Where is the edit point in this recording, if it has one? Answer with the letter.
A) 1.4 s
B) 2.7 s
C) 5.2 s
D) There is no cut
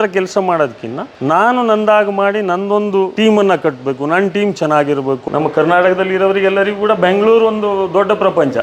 C